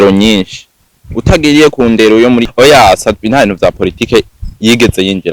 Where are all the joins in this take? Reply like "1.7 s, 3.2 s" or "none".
2.5 s